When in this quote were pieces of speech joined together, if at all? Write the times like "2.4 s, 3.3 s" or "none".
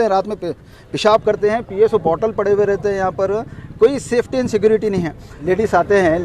5.3 s